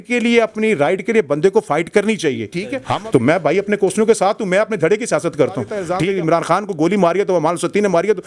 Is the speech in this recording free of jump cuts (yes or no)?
no